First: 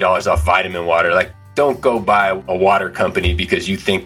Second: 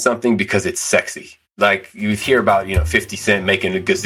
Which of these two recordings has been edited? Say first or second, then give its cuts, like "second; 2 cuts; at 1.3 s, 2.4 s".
first; 2 cuts; at 1.4 s, 2.4 s